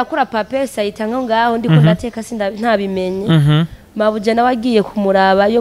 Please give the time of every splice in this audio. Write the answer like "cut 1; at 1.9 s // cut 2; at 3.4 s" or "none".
none